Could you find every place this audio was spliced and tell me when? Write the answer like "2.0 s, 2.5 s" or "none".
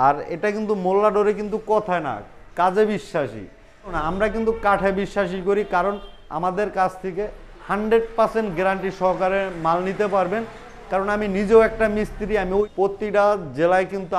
4.0 s, 12.6 s